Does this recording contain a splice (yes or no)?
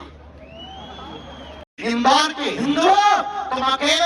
yes